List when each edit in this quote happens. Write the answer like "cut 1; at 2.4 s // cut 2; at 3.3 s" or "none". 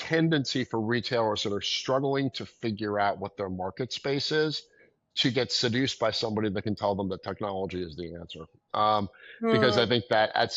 none